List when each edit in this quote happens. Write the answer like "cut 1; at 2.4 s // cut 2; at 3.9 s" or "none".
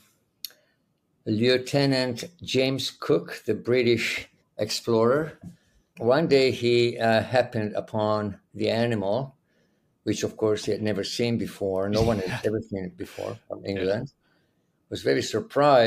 cut 1; at 5.9 s